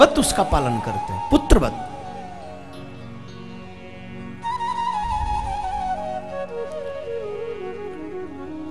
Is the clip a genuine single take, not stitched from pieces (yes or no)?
yes